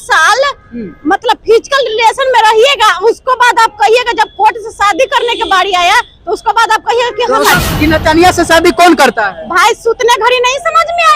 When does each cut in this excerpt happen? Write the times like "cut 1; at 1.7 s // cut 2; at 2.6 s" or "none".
cut 1; at 7.5 s